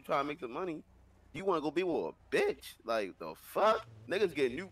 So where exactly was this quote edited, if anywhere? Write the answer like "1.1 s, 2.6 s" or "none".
none